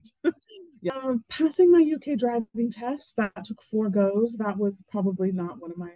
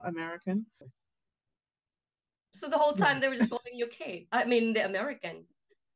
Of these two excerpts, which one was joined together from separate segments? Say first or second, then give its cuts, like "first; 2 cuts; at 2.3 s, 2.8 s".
first; 1 cut; at 1.0 s